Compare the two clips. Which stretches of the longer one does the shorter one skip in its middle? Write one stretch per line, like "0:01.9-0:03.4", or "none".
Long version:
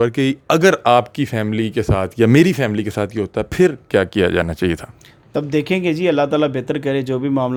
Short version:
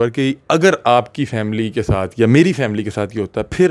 none